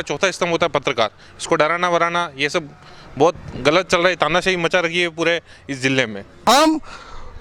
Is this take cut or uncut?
cut